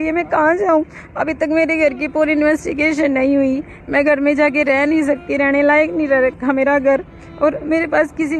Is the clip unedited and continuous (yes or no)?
yes